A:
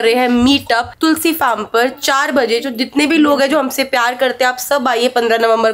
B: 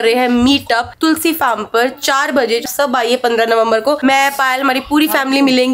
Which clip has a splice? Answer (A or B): B